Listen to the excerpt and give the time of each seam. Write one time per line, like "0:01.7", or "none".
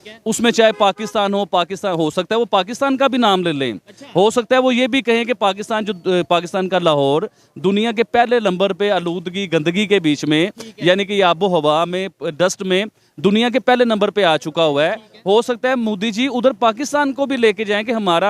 none